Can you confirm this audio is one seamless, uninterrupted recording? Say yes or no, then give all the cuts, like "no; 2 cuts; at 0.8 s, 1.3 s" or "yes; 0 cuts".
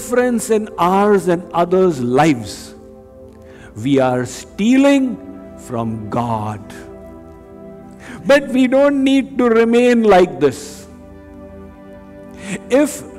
no; 1 cut; at 8.0 s